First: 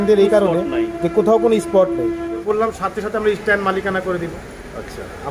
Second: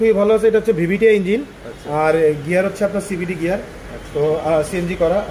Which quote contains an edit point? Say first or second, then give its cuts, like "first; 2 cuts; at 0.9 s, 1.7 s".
first; 1 cut; at 2.4 s